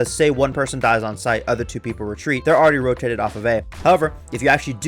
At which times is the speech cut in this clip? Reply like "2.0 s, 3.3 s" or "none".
2.4 s, 3.7 s